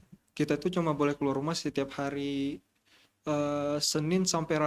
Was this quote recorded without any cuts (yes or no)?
yes